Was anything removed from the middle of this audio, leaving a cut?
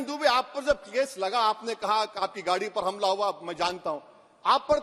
no; 0 cuts

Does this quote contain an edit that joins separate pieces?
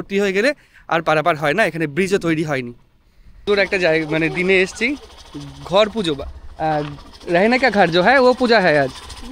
yes; 1 cut; at 3.5 s

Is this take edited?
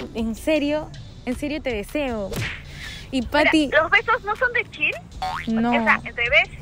no; 0 cuts

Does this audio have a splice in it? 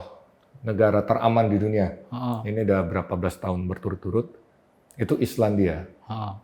no; 0 cuts

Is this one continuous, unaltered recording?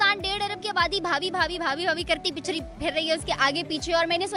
yes; 0 cuts

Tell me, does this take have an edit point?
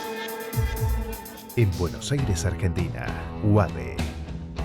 yes; 1 cut; at 1.3 s

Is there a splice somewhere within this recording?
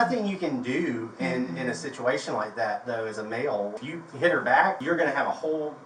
yes; 2 cuts; at 3.7 s, 4.8 s

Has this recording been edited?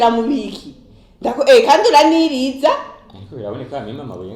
no; 0 cuts

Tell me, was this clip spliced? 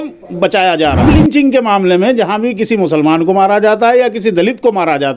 yes; 1 cut; at 1.0 s

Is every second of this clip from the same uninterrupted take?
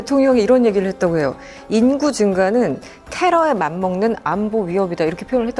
yes; 0 cuts

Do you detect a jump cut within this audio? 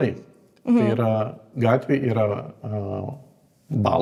no; 0 cuts

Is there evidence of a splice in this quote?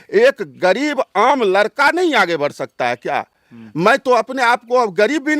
no; 0 cuts

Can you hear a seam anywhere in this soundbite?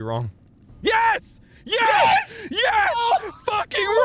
no; 0 cuts

